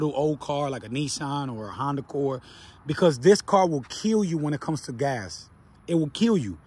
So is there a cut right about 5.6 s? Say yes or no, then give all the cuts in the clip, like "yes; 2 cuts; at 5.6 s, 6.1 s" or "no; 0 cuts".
no; 0 cuts